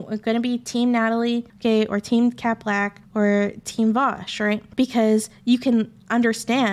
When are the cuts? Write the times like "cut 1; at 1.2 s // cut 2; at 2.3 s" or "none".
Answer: cut 1; at 1.5 s // cut 2; at 3.0 s // cut 3; at 4.7 s